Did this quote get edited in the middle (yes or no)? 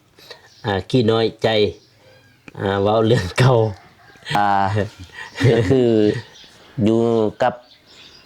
yes